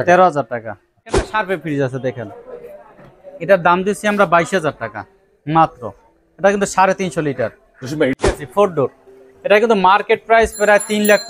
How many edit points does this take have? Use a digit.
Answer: 2